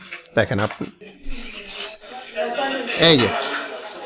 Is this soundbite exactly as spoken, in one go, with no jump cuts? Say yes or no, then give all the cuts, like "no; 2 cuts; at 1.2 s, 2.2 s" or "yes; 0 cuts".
no; 1 cut; at 1.0 s